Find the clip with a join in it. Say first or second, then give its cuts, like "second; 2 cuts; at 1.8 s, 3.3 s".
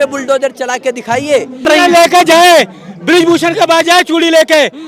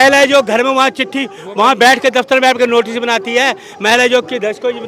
first; 1 cut; at 1.7 s